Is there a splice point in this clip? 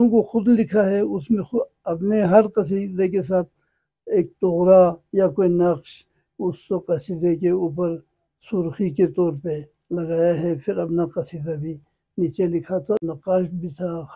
yes; 1 cut; at 13.0 s

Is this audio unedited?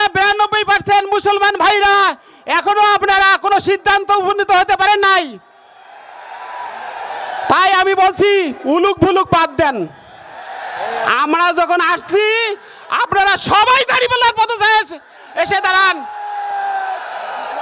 yes; 0 cuts

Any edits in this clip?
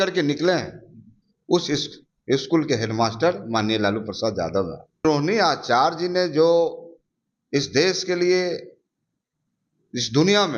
yes; 1 cut; at 5.0 s

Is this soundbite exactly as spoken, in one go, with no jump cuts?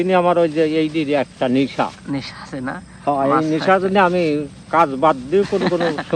yes; 0 cuts

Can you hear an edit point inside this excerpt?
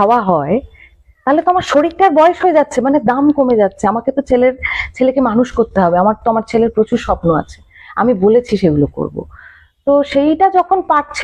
no; 0 cuts

